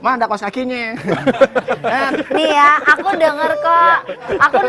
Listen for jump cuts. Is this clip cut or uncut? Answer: cut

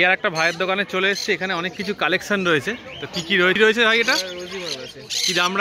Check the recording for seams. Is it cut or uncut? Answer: uncut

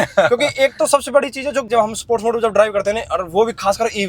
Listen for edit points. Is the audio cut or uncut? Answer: cut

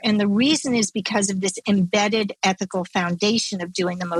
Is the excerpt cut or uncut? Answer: uncut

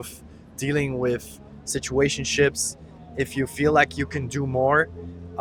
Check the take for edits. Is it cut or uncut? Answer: uncut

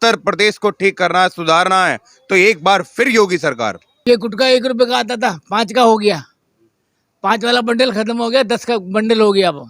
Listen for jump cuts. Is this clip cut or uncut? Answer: cut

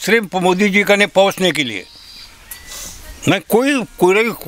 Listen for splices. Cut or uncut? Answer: uncut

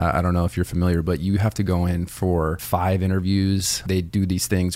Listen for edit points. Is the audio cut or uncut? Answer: cut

